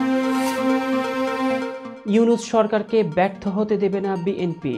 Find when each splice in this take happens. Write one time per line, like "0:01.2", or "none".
0:01.8